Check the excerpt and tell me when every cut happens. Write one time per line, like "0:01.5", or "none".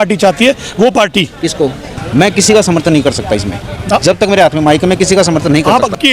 0:01.8